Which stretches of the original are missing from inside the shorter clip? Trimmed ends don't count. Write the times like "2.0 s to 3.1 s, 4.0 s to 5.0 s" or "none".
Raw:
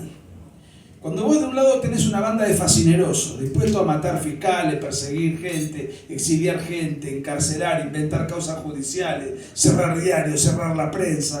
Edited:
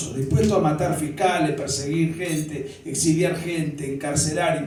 none